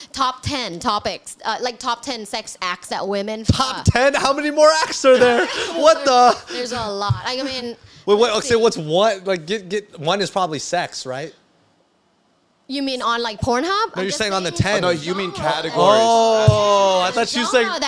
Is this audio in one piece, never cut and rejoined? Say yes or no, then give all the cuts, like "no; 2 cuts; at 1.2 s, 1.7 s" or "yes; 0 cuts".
yes; 0 cuts